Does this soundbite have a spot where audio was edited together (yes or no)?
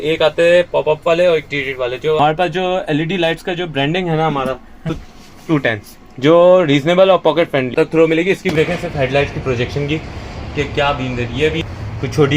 yes